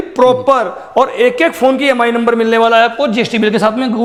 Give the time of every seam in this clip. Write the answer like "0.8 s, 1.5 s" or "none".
none

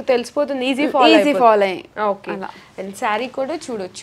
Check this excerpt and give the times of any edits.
none

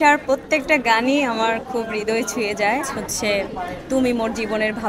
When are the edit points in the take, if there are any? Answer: 3.0 s

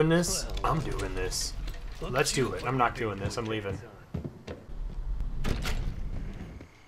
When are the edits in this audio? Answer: 4.7 s

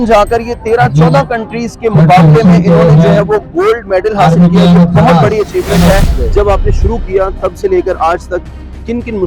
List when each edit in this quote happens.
6.0 s

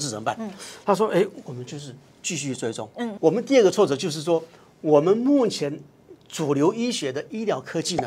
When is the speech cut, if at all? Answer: 3.1 s

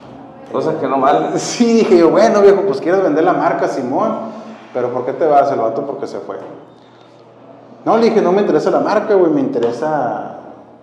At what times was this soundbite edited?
none

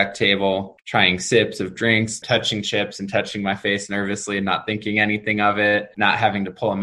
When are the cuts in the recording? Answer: 2.2 s, 5.9 s

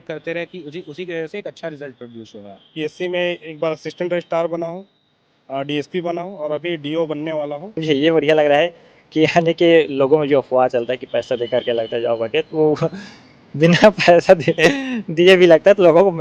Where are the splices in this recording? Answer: 2.6 s, 7.8 s

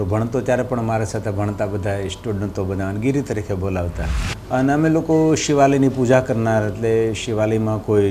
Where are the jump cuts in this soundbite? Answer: 4.3 s

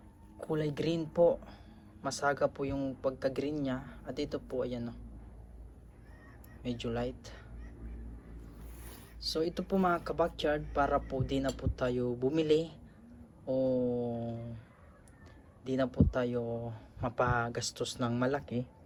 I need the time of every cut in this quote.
none

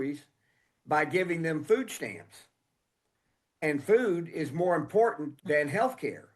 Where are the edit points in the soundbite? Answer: 5.3 s

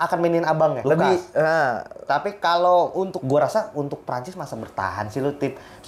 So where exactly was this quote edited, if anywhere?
0.8 s, 3.2 s

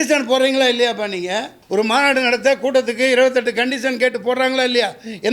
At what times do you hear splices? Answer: 1.5 s

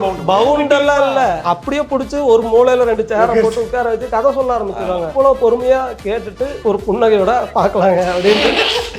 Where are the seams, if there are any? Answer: 1.4 s, 5.1 s, 6.5 s

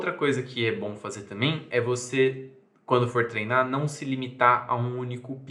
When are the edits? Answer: none

